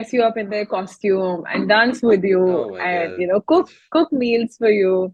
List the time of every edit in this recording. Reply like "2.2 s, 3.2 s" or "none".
none